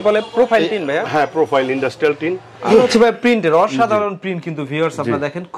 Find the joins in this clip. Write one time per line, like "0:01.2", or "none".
0:02.5